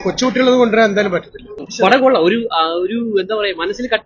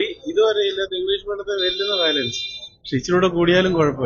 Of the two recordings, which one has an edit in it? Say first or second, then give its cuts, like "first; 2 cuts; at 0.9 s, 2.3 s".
first; 1 cut; at 1.7 s